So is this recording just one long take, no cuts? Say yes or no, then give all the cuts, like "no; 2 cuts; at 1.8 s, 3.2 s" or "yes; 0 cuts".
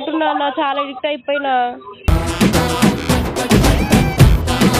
yes; 0 cuts